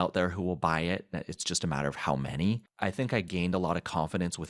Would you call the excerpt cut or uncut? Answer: cut